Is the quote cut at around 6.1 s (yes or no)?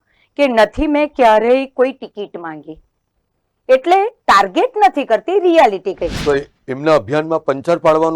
yes